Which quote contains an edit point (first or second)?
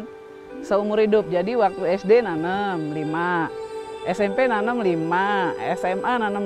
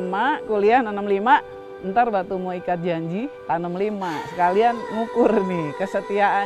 second